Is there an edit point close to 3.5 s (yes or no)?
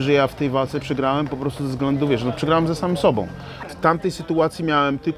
yes